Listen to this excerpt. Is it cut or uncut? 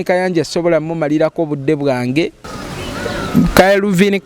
cut